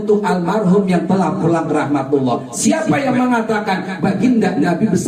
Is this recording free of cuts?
yes; 0 cuts

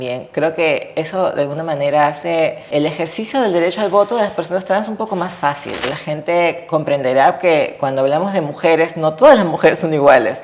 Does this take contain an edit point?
yes; 2 cuts; at 2.7 s, 5.9 s

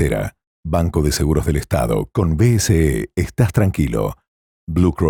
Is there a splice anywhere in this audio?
no; 0 cuts

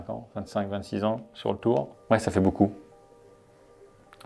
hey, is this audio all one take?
no; 1 cut; at 2.0 s

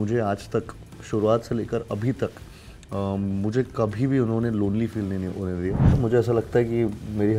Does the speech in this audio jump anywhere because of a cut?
yes; 1 cut; at 6.0 s

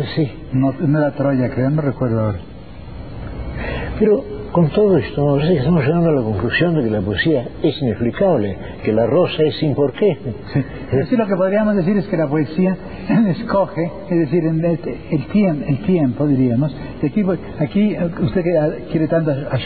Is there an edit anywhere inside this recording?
yes; 1 cut; at 11.7 s

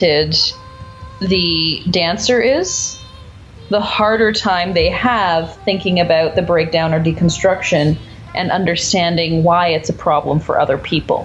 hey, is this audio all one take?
yes; 0 cuts

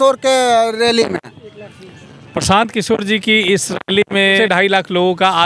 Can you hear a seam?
yes; 1 cut; at 4.4 s

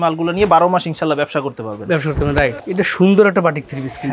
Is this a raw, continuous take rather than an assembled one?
yes; 0 cuts

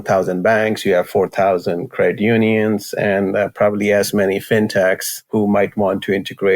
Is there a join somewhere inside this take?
yes; 1 cut; at 5.3 s

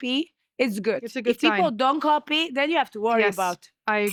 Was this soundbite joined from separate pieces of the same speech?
no; 0 cuts

